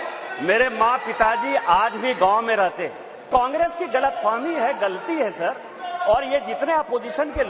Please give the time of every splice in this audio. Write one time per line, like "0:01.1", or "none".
0:03.2